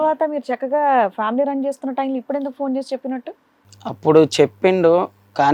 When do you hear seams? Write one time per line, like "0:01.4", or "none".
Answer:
none